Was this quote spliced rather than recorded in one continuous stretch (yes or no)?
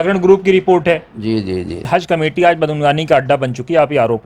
yes